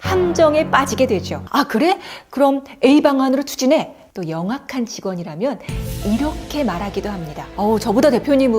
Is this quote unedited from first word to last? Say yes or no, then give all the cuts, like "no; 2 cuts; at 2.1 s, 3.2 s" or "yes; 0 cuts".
no; 2 cuts; at 1.4 s, 4.0 s